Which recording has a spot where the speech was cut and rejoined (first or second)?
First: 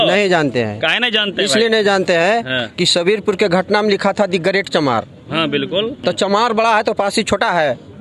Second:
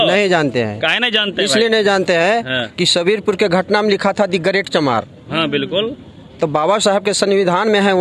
first